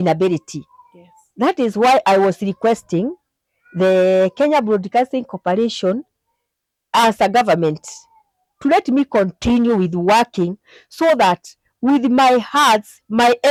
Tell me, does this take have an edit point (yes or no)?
no